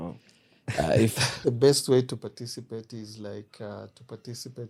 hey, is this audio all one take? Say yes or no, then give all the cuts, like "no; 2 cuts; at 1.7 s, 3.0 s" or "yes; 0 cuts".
no; 1 cut; at 1.3 s